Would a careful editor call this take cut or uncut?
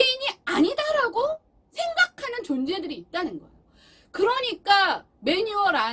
uncut